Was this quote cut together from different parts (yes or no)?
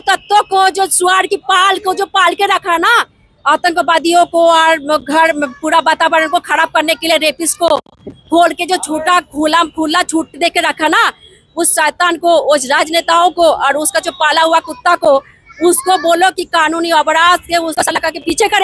yes